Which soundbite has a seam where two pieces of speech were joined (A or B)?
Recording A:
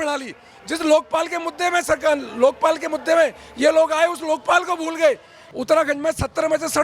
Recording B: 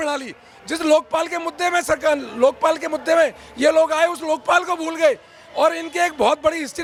A